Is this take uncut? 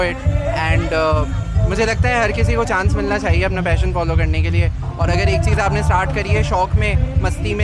yes; 0 cuts

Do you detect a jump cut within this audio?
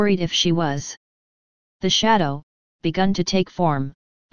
yes; 1 cut; at 2.7 s

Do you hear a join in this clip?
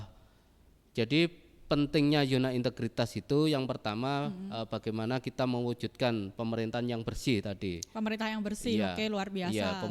no; 0 cuts

